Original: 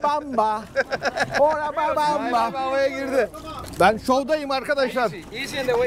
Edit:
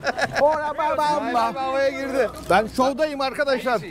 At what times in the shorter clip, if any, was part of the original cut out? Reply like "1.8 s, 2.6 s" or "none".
2.4 s